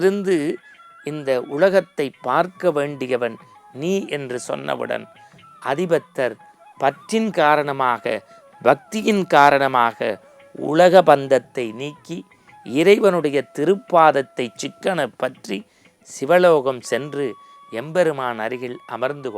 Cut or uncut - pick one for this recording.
uncut